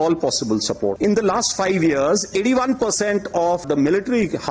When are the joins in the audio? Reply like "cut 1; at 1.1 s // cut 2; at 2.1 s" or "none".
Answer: cut 1; at 1.0 s // cut 2; at 3.6 s